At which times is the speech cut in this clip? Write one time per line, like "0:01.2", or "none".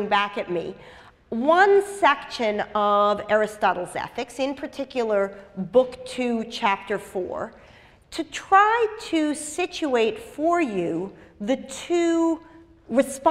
0:12.0